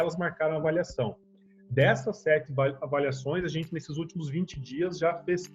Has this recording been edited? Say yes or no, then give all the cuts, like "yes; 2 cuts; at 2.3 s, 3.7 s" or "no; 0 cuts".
no; 0 cuts